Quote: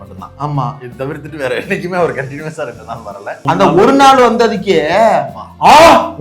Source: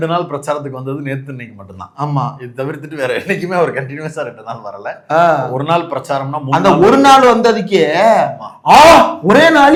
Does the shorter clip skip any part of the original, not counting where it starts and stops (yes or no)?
yes